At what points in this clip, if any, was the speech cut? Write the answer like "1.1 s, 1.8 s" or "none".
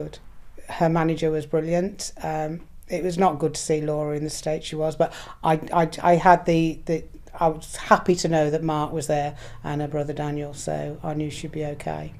none